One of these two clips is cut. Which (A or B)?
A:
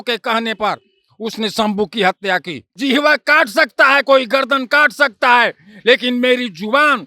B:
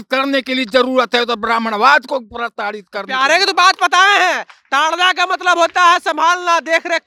A